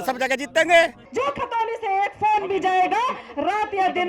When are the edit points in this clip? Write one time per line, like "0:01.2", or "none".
0:01.0